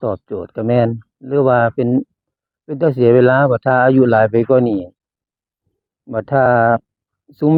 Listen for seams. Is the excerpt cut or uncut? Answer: uncut